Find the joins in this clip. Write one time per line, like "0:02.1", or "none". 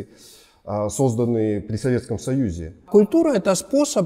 0:02.9